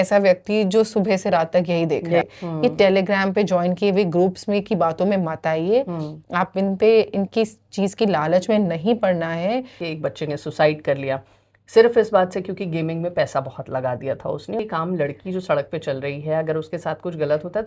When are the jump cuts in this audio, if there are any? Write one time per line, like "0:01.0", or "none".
0:02.2
0:09.8
0:14.6